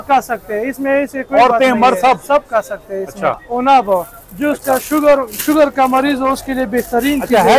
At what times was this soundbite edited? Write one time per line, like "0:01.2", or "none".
0:03.4